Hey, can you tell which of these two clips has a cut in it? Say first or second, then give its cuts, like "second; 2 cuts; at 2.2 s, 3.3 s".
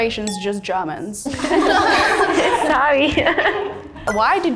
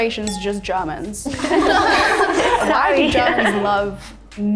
second; 1 cut; at 3.5 s